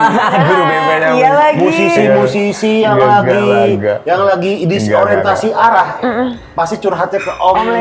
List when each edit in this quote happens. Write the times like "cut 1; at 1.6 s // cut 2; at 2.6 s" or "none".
none